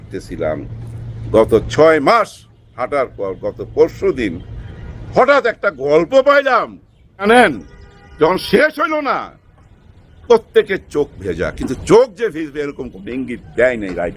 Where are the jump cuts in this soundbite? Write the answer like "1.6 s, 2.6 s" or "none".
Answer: 7.2 s